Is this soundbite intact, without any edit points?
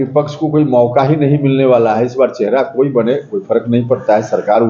yes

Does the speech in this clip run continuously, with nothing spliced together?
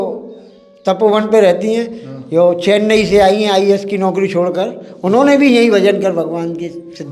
yes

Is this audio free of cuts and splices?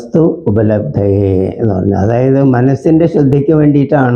yes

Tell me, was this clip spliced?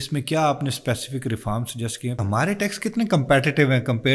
yes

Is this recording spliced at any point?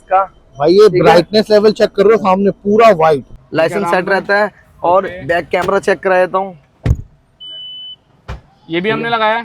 yes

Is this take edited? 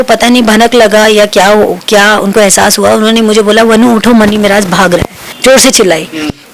yes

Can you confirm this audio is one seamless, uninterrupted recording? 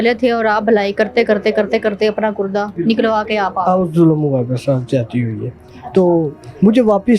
yes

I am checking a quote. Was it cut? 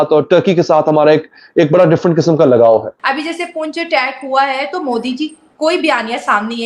yes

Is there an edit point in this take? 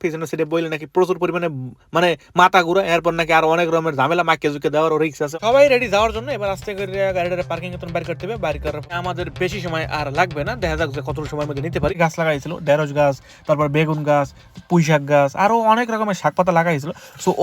yes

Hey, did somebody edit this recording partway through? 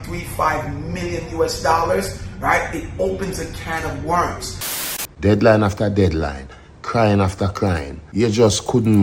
yes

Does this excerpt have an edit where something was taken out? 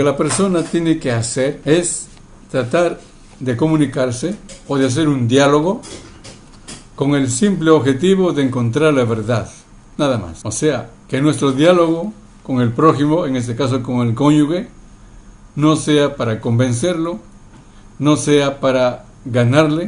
yes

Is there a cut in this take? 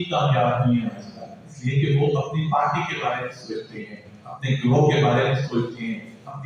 no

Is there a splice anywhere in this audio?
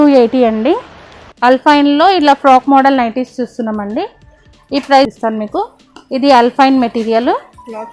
yes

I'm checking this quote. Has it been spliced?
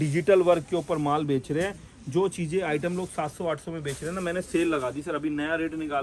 no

